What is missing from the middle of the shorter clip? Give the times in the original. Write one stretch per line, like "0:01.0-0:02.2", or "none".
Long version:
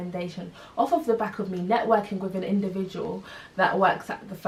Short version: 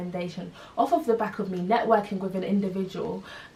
none